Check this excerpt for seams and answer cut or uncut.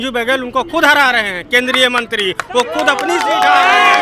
uncut